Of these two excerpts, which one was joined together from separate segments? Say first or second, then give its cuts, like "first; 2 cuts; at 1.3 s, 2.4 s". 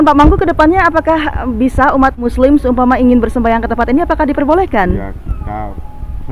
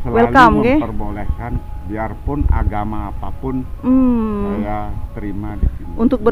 first; 1 cut; at 2.2 s